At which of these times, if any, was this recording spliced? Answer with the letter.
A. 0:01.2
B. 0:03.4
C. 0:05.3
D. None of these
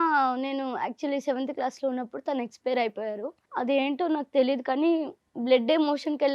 B